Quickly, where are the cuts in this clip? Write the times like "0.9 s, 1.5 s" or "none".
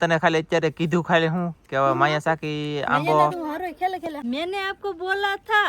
4.2 s